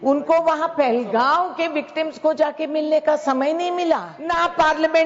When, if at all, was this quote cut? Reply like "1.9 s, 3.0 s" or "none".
4.1 s